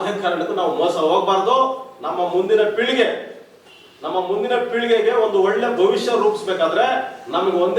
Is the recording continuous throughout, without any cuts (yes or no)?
yes